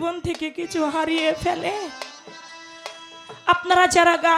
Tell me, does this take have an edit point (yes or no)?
no